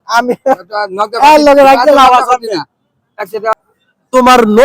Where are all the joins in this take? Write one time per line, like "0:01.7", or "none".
0:03.6